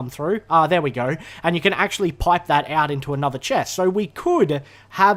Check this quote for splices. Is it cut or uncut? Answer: uncut